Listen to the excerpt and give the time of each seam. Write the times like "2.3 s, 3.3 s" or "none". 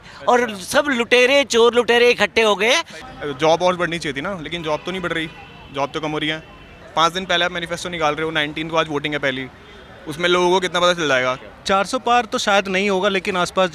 2.9 s, 6.8 s, 11.4 s